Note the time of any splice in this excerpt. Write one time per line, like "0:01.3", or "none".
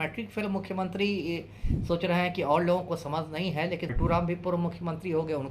0:03.9